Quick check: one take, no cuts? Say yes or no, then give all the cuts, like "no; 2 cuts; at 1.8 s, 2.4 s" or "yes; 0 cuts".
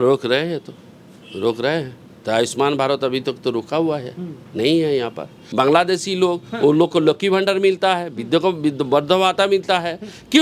no; 1 cut; at 5.4 s